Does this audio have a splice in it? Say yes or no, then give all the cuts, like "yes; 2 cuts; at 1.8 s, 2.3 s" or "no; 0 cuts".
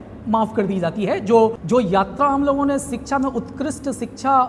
yes; 1 cut; at 1.6 s